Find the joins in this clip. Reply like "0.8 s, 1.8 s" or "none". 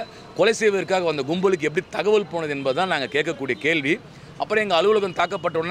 none